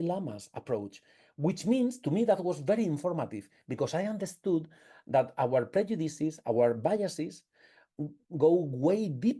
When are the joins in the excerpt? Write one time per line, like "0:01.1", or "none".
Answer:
none